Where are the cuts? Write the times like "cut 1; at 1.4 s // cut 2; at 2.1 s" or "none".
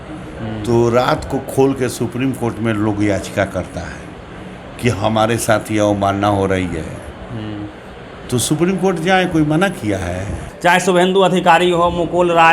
cut 1; at 10.4 s